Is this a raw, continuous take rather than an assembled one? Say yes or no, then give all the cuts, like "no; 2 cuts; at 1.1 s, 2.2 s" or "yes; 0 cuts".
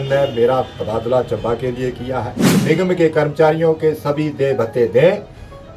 no; 1 cut; at 2.5 s